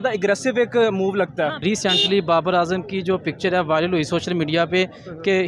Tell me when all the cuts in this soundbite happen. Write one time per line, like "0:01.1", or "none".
0:01.6